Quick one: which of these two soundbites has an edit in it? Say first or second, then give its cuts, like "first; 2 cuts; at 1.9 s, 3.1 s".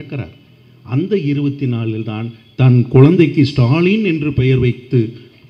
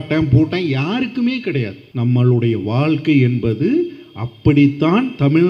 second; 1 cut; at 1.8 s